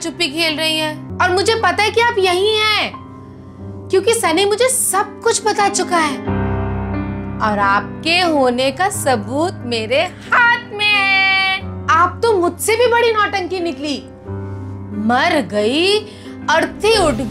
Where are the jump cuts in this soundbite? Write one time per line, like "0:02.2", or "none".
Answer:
0:01.0